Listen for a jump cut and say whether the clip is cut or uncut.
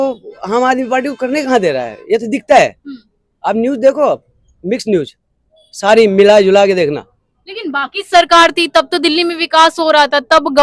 uncut